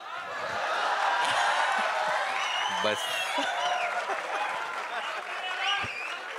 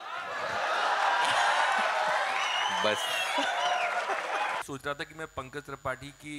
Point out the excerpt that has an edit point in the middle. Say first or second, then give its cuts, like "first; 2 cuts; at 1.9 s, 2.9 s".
second; 1 cut; at 4.6 s